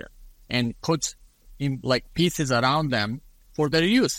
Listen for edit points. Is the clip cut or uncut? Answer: uncut